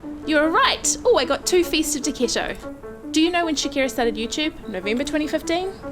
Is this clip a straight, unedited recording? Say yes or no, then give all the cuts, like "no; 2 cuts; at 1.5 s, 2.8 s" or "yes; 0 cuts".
no; 1 cut; at 3.1 s